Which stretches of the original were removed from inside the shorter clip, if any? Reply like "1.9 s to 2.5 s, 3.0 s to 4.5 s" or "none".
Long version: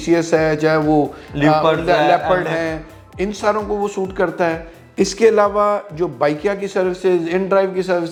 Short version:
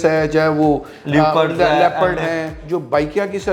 2.9 s to 5.9 s